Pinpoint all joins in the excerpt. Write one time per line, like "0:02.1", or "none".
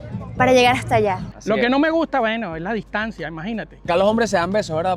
0:01.3
0:03.9